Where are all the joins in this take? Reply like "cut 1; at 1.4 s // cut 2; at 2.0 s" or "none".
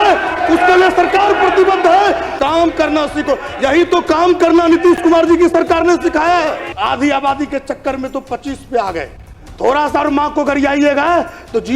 cut 1; at 2.3 s // cut 2; at 6.7 s